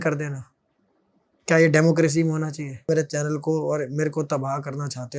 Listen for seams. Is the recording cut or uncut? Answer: cut